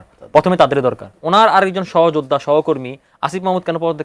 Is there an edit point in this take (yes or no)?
yes